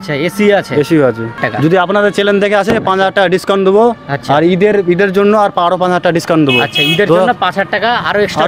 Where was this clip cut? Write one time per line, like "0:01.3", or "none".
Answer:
0:01.4